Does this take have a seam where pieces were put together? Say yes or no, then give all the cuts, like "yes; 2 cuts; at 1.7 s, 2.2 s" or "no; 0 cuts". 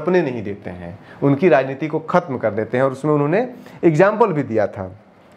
no; 0 cuts